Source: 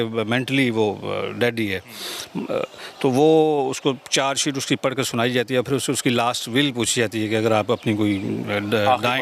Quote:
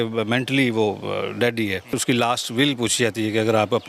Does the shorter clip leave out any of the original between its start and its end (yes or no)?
yes